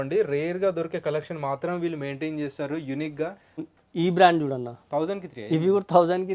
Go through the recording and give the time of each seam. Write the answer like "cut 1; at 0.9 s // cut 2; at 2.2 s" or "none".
cut 1; at 3.5 s